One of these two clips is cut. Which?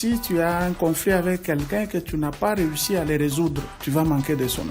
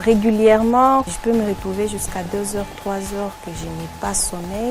first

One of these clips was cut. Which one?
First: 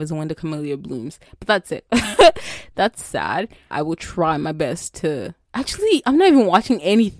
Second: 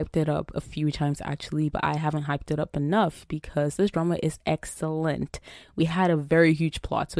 first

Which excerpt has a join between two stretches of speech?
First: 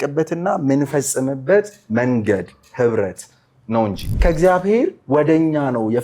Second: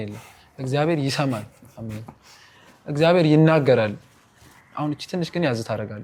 first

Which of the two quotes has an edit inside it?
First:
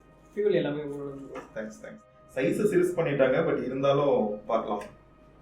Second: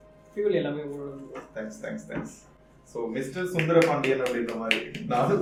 first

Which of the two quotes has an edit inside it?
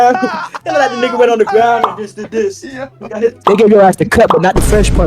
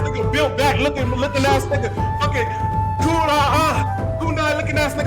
first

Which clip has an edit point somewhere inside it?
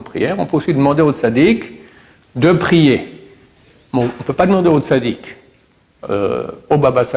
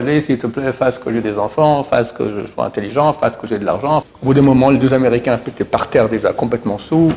second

